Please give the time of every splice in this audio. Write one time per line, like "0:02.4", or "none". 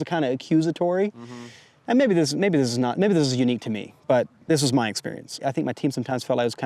none